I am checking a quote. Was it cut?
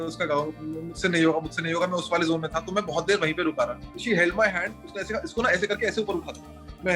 yes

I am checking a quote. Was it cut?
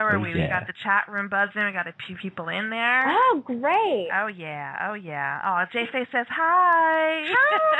no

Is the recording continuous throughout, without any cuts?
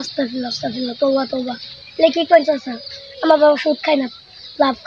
yes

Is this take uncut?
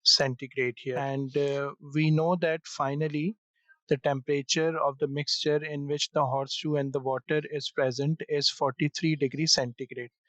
no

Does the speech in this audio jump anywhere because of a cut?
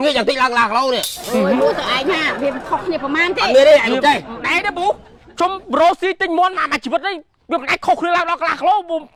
no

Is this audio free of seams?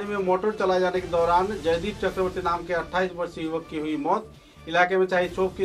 yes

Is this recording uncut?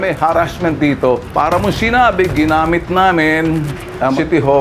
no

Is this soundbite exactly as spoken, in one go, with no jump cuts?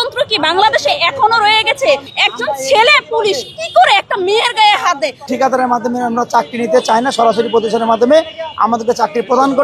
no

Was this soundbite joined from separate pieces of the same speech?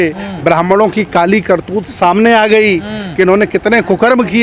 no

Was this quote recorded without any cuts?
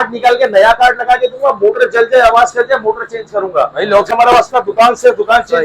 no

